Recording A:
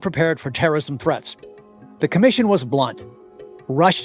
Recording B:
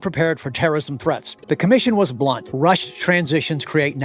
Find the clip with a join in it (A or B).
B